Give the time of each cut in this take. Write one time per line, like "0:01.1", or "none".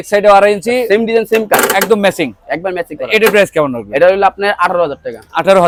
none

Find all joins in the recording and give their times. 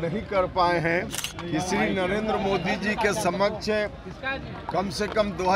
0:01.2

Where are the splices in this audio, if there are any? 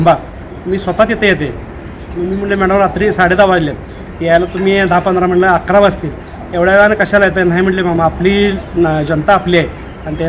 none

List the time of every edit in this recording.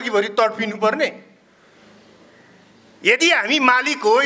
none

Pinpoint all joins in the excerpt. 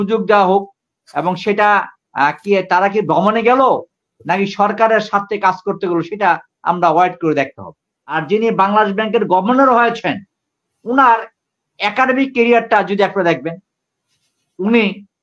0:08.2

